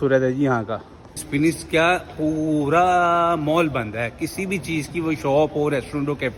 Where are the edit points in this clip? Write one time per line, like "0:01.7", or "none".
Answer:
none